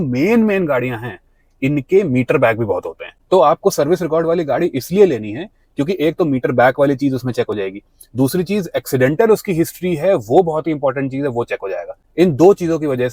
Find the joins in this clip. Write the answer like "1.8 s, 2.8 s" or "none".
none